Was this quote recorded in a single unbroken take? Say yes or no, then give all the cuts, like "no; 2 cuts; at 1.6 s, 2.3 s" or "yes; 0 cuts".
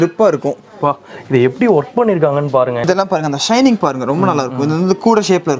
no; 1 cut; at 2.8 s